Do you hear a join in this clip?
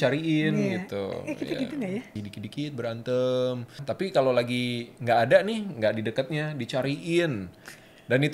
yes; 2 cuts; at 2.1 s, 3.8 s

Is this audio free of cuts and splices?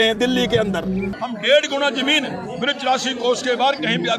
no; 1 cut; at 1.1 s

